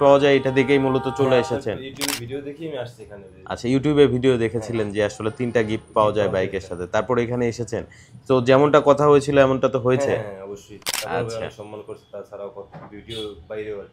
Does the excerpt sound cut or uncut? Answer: uncut